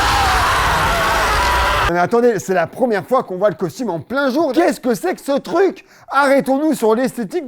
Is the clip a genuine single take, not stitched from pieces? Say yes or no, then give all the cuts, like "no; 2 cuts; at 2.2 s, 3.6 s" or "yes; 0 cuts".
no; 2 cuts; at 1.9 s, 4.5 s